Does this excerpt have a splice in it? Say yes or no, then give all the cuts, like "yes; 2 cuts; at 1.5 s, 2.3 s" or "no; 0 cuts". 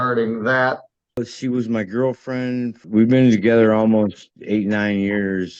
yes; 2 cuts; at 1.2 s, 2.8 s